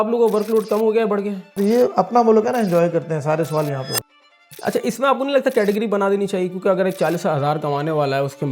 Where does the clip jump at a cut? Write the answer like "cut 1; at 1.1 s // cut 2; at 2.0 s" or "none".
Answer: cut 1; at 1.6 s // cut 2; at 4.1 s